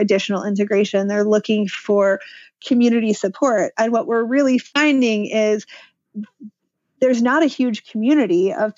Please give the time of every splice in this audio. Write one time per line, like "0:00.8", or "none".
none